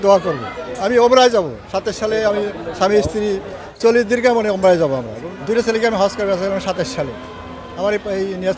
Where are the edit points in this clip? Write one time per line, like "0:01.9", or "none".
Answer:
0:05.2

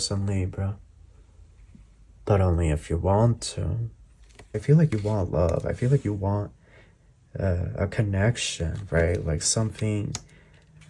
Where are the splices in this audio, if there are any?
0:04.6

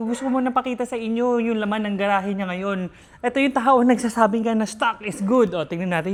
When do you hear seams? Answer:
none

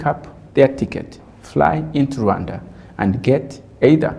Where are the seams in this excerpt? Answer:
none

